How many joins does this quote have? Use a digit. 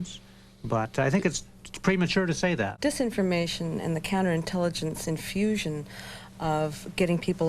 1